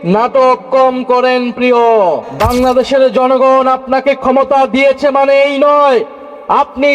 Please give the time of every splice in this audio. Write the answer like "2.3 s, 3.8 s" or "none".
2.3 s